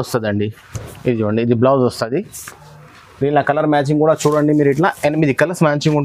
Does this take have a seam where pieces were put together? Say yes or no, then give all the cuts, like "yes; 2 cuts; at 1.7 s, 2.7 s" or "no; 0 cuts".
no; 0 cuts